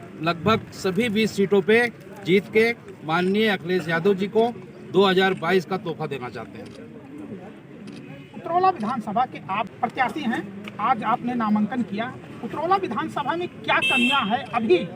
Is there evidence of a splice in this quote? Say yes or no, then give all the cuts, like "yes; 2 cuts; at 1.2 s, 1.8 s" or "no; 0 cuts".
no; 0 cuts